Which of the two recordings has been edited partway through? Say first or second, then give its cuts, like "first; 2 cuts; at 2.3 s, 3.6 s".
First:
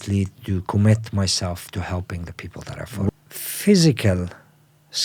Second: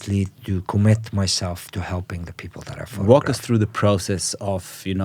first; 1 cut; at 3.1 s